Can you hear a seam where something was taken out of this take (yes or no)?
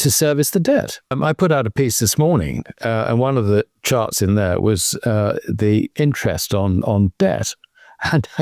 yes